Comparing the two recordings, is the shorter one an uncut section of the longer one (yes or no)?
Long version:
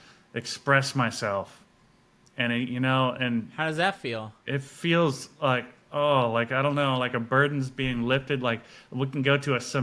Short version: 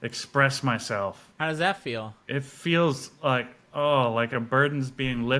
no